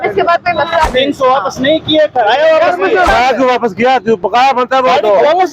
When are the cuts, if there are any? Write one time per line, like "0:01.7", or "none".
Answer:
0:00.9
0:03.1